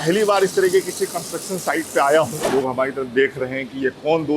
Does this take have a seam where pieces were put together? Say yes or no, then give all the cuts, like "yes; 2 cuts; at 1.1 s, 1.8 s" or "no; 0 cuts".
yes; 1 cut; at 2.4 s